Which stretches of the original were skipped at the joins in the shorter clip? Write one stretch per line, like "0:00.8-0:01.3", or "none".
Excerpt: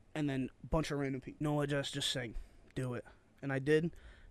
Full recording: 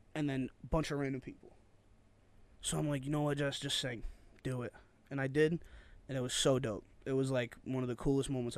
0:01.4-0:03.0